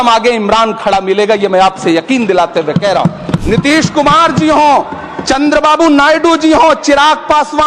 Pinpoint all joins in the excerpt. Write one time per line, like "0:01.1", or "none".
0:03.4